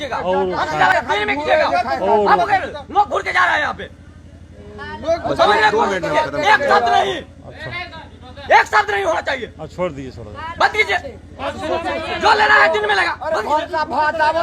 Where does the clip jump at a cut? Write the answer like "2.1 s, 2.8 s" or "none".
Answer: 0.9 s